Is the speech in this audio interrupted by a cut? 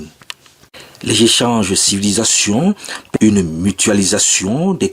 yes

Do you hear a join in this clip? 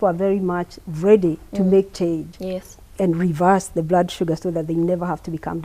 no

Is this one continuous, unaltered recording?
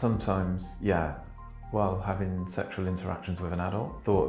yes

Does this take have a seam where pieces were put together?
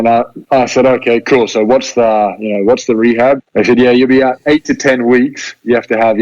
yes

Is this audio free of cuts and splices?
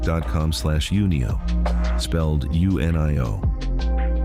yes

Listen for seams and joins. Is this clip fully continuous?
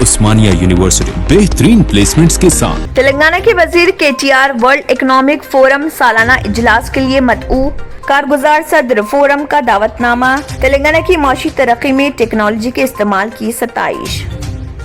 no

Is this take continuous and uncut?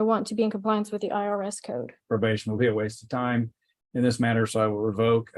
no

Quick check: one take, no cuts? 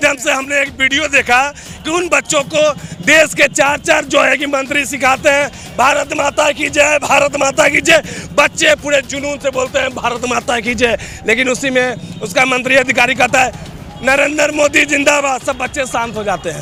yes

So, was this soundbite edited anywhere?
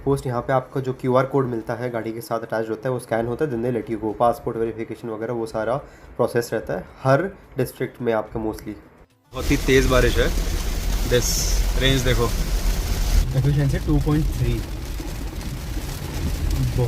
yes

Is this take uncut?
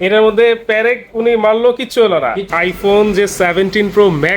no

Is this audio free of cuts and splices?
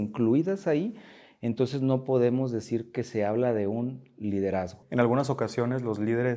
no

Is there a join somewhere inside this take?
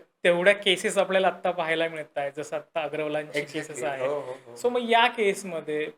no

